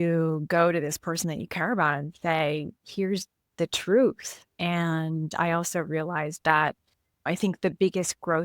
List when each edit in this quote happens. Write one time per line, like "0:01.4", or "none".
0:07.3

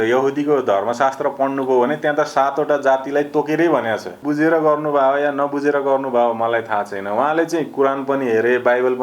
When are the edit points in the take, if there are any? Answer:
0:04.2

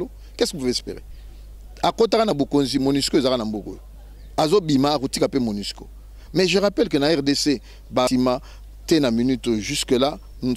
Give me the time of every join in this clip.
0:08.1

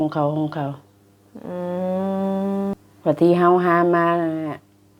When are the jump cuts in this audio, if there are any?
0:02.7

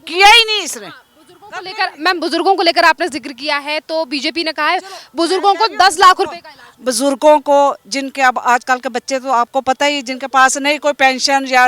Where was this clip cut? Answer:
none

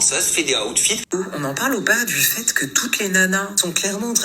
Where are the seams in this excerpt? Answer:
0:01.0

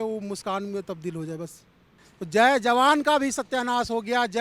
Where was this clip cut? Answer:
0:01.9

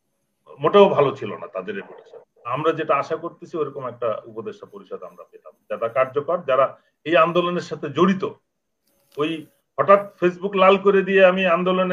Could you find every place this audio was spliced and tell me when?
0:02.5

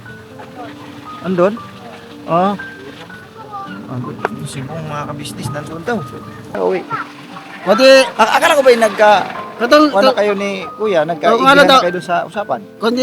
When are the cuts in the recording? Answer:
0:06.5

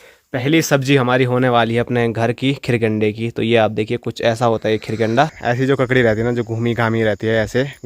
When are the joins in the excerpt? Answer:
0:05.4

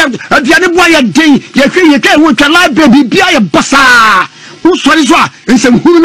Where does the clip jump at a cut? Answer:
none

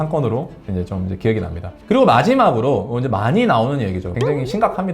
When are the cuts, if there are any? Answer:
0:01.6
0:04.0

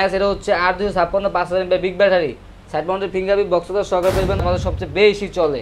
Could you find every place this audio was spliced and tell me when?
0:04.4

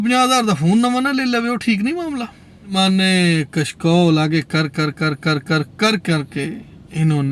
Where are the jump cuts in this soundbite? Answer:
0:02.8

